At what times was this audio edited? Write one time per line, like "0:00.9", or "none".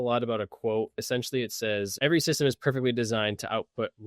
0:01.0
0:01.9

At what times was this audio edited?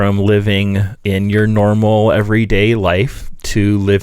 0:00.9

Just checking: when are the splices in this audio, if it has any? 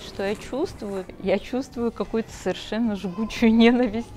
0:01.1

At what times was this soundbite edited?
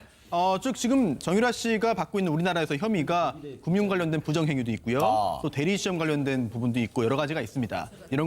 0:04.0

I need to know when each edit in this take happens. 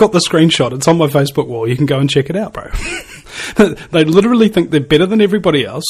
none

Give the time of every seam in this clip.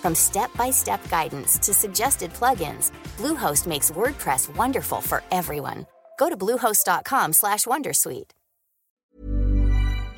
0:09.0

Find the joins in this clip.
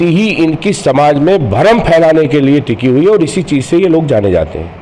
none

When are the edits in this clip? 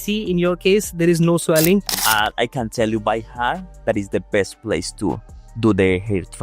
0:01.9

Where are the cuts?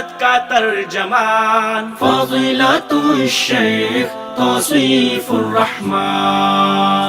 none

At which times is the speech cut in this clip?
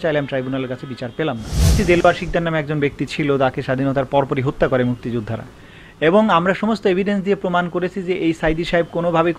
0:01.6

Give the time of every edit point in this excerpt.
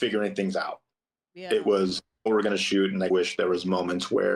0:02.3

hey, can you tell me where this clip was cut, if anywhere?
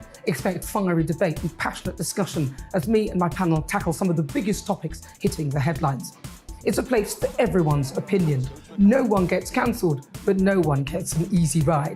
none

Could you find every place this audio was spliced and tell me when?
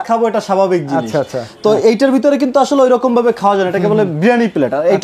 none

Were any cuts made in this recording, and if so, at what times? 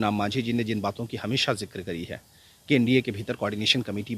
none

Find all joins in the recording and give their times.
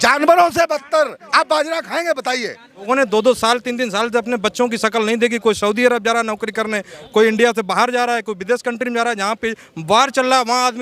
0:02.8

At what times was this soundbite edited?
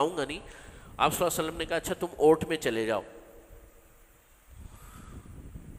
none

